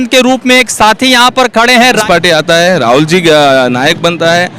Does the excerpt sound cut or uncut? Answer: cut